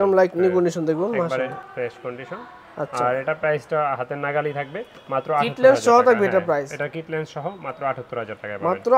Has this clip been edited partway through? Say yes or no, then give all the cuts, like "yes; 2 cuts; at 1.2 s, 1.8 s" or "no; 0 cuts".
no; 0 cuts